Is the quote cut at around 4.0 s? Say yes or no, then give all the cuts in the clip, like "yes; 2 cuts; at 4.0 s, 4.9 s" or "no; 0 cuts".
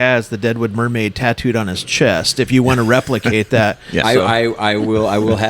yes; 1 cut; at 4.0 s